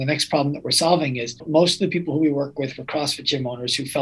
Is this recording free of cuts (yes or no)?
no